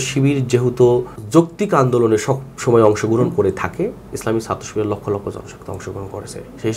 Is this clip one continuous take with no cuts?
no; 1 cut; at 1.2 s

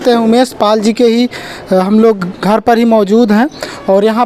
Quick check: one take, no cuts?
yes; 0 cuts

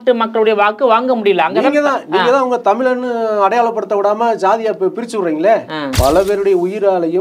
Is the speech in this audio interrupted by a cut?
yes; 1 cut; at 5.9 s

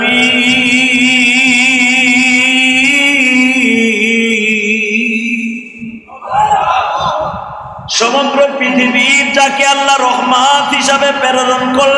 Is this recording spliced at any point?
no; 0 cuts

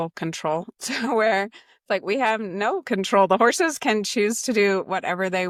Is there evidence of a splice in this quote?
no; 0 cuts

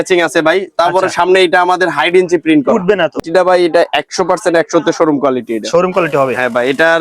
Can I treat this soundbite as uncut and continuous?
no; 1 cut; at 3.2 s

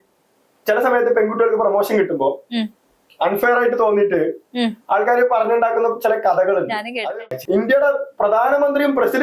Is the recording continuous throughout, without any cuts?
no; 1 cut; at 7.0 s

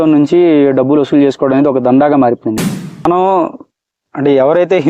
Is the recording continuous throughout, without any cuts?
no; 1 cut; at 3.1 s

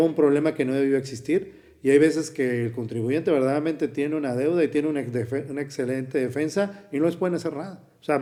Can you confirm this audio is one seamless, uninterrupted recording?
yes; 0 cuts

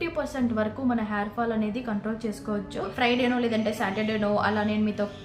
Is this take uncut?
no; 1 cut; at 2.9 s

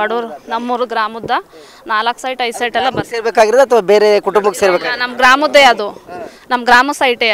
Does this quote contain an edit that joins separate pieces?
no; 0 cuts

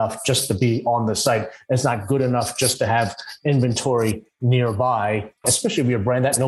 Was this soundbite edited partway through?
yes; 1 cut; at 5.5 s

